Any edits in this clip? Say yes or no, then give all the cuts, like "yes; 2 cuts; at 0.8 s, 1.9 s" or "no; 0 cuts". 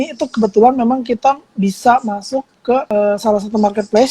yes; 1 cut; at 2.9 s